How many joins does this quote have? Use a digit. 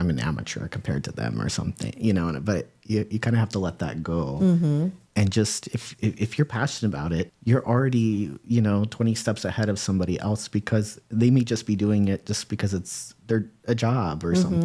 1